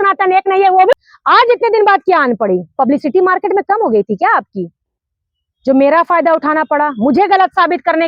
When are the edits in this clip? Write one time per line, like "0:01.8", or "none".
0:00.9